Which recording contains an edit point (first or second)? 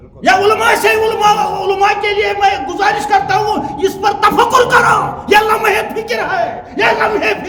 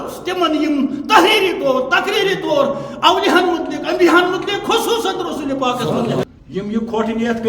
second